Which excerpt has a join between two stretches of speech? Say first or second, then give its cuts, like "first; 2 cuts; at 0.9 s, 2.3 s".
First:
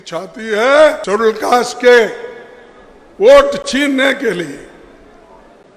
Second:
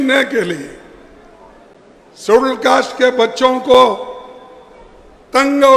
first; 1 cut; at 1.0 s